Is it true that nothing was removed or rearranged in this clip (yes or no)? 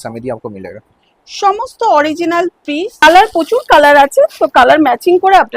no